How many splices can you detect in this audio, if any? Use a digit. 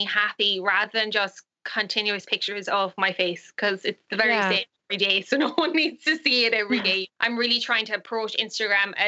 1